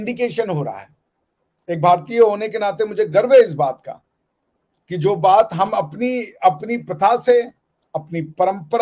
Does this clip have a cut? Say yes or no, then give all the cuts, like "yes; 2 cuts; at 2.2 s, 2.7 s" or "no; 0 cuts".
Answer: no; 0 cuts